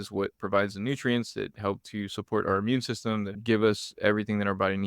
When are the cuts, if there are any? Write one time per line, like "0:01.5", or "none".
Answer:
0:03.4